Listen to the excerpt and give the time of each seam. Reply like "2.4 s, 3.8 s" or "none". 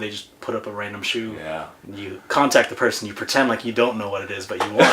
1.7 s